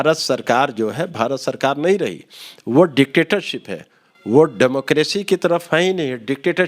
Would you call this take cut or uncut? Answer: uncut